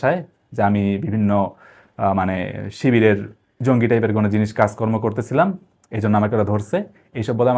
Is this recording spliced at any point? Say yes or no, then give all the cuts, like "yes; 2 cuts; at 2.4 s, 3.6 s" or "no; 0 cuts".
no; 0 cuts